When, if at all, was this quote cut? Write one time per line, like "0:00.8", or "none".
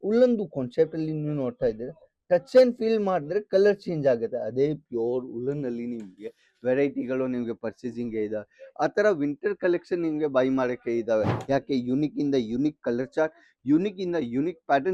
0:11.4